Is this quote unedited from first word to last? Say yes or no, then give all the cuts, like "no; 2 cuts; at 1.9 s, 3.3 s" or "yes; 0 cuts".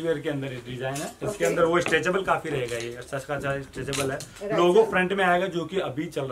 yes; 0 cuts